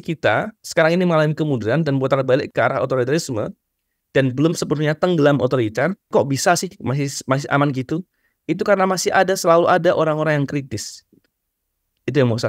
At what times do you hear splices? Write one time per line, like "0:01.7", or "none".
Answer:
0:06.1

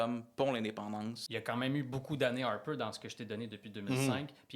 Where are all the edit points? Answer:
0:01.3

